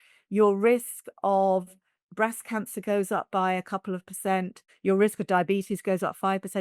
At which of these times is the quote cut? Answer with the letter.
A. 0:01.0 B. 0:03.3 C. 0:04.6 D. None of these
C